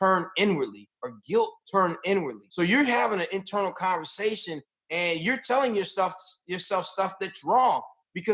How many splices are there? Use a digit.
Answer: 1